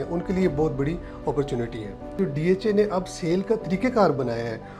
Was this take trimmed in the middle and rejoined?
yes; 1 cut; at 2.1 s

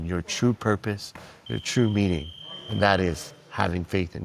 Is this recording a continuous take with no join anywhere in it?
yes; 0 cuts

